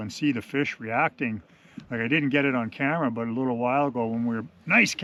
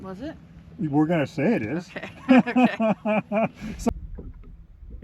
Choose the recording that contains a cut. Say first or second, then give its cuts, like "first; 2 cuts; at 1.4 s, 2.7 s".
second; 1 cut; at 3.9 s